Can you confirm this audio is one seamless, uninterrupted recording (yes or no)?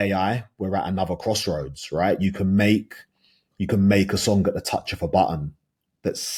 yes